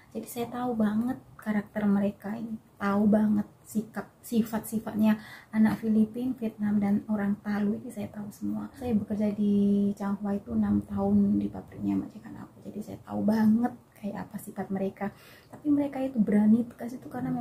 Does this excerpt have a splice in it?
yes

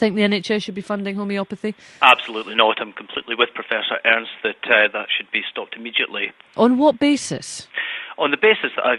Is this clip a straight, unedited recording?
yes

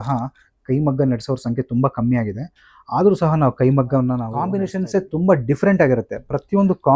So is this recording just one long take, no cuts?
no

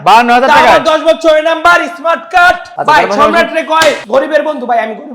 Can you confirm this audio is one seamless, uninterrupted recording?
no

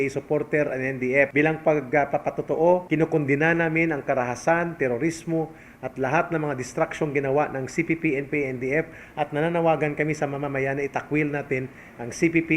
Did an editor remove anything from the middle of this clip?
yes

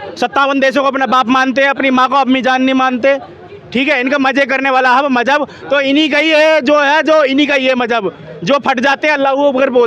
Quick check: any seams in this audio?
no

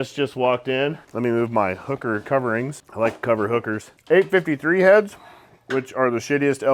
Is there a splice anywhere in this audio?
yes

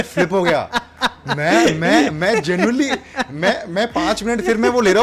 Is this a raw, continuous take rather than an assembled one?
yes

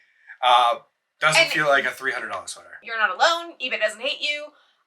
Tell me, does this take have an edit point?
yes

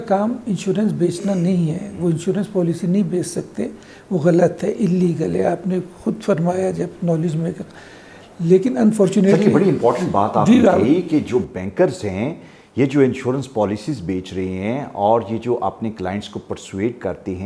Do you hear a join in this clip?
no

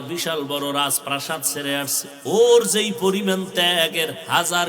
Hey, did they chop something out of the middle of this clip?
yes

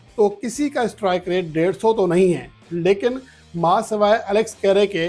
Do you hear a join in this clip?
no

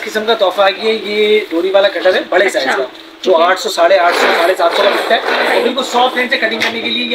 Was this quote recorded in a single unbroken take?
yes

